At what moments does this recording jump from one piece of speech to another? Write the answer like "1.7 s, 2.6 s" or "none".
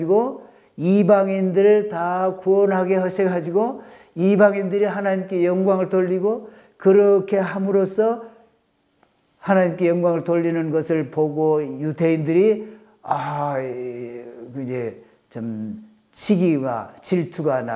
none